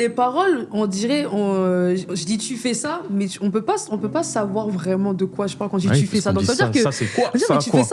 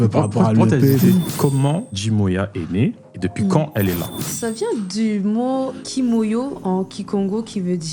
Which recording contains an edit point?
second; 3 cuts; at 1.5 s, 4.2 s, 5.8 s

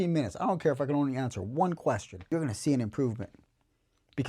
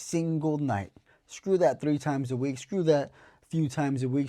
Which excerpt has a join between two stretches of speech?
first; 1 cut; at 2.3 s

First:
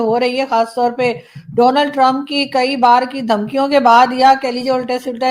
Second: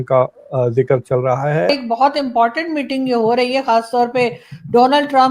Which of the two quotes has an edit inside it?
second; 1 cut; at 1.8 s

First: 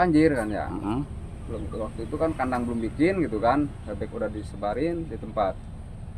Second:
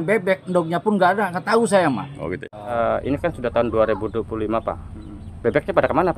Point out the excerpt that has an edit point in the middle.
second; 1 cut; at 2.7 s

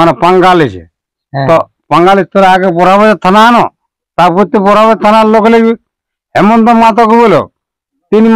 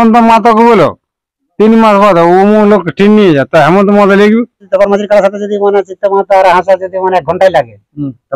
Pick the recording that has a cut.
second; 1 cut; at 4.7 s

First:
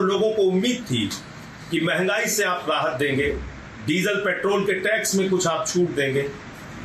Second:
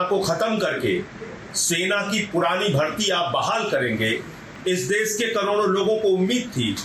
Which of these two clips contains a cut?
second; 1 cut; at 4.4 s

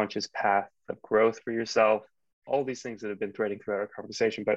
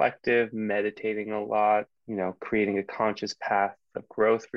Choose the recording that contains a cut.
second; 1 cut; at 2.0 s

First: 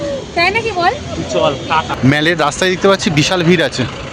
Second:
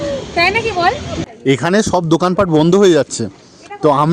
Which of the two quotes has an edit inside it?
second; 1 cut; at 1.1 s

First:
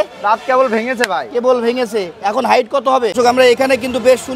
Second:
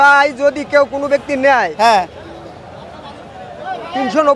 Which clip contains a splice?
first; 1 cut; at 3.1 s

